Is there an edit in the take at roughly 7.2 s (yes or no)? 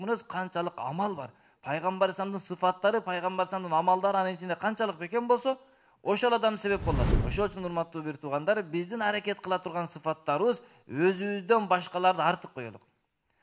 yes